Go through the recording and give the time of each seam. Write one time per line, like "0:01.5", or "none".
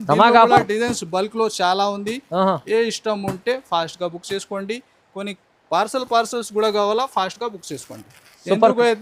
none